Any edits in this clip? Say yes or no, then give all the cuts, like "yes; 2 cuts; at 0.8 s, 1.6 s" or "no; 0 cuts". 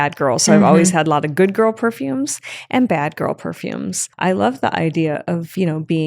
yes; 1 cut; at 4.0 s